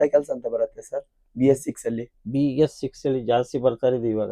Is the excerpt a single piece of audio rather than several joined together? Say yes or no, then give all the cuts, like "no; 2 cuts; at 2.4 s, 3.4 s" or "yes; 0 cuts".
yes; 0 cuts